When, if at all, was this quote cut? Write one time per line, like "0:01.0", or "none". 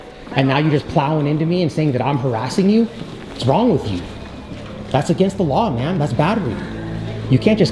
none